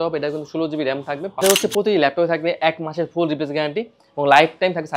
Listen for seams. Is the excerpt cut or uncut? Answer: cut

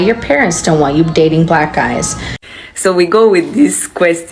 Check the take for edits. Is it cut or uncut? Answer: cut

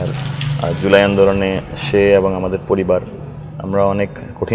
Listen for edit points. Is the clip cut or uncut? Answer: uncut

